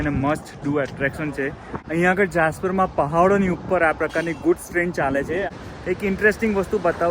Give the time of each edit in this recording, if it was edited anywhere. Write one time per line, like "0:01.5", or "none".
0:01.7
0:05.5